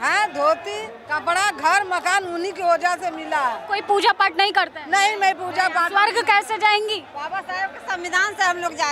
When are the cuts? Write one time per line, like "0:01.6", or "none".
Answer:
0:01.0
0:03.7
0:07.1